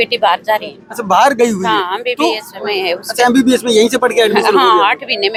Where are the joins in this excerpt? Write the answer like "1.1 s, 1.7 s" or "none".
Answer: none